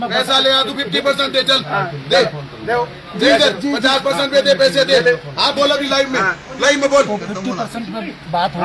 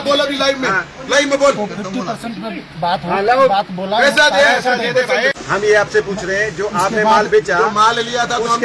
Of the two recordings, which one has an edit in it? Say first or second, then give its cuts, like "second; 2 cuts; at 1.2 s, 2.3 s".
second; 1 cut; at 5.3 s